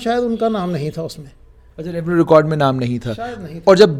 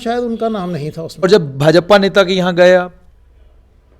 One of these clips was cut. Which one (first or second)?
second